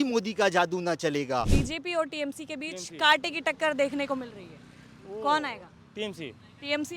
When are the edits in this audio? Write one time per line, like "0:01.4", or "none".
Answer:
0:01.5